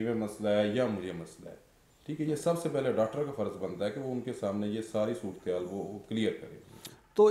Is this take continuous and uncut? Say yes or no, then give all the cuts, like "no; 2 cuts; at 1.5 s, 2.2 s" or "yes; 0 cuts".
yes; 0 cuts